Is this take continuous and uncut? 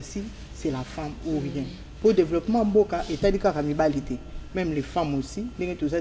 no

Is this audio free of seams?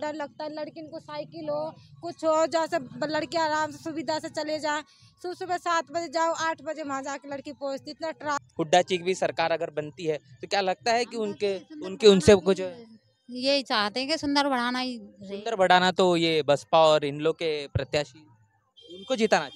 no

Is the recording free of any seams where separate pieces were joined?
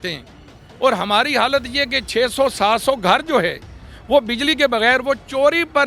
yes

